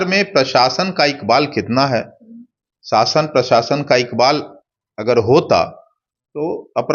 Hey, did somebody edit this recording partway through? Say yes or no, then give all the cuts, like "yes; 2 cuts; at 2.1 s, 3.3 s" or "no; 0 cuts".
no; 0 cuts